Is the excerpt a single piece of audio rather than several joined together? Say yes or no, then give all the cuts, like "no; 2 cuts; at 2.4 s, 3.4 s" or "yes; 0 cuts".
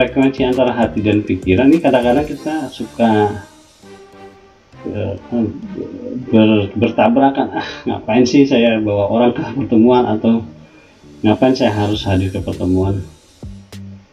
no; 1 cut; at 13.2 s